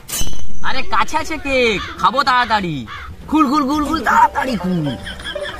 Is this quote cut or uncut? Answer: uncut